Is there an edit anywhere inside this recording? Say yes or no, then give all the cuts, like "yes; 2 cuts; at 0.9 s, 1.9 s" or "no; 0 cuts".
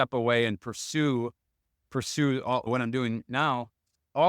yes; 1 cut; at 2.7 s